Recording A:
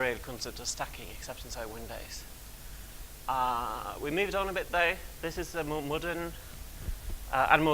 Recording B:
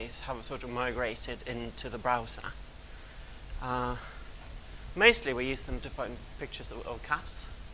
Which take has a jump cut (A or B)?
A